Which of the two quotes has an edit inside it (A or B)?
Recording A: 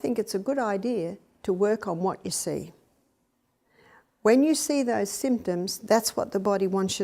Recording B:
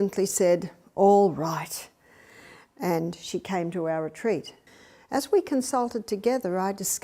B